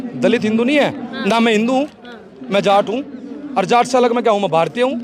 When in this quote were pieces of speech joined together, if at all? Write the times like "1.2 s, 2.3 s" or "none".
none